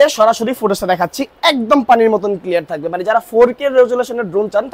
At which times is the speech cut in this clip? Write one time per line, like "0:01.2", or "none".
none